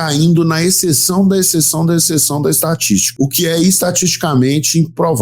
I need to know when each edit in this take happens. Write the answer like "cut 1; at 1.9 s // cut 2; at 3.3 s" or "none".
cut 1; at 3.1 s